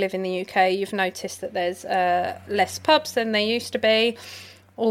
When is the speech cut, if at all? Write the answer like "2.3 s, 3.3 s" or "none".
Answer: none